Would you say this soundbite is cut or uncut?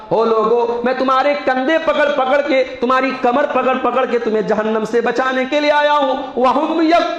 uncut